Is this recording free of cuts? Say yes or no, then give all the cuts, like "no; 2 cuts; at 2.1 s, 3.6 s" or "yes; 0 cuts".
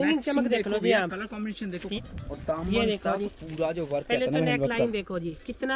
no; 1 cut; at 2.0 s